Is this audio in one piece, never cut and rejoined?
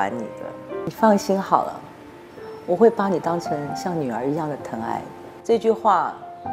no; 2 cuts; at 0.9 s, 5.3 s

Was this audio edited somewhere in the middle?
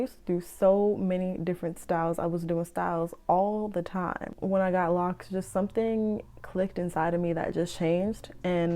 yes; 1 cut; at 4.3 s

